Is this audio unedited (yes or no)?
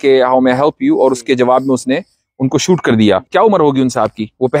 no